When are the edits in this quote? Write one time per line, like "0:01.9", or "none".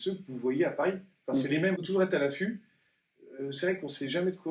0:01.8